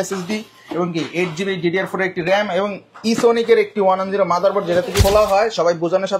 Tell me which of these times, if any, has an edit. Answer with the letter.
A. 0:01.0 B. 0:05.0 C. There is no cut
B